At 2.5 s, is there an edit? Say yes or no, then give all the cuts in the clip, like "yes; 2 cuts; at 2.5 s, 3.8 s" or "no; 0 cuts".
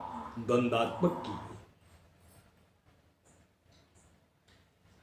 no; 0 cuts